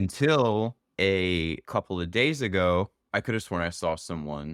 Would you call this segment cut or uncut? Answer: uncut